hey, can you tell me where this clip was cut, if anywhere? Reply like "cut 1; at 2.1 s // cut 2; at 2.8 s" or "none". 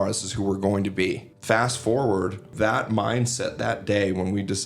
cut 1; at 1.3 s // cut 2; at 2.5 s